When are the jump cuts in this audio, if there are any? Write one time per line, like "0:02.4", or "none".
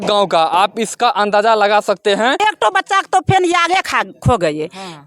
0:02.4